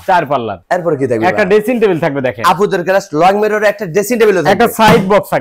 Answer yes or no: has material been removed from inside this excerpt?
no